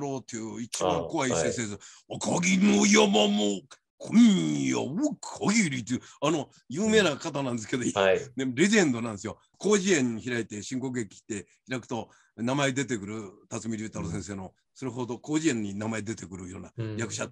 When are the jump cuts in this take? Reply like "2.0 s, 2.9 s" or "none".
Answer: none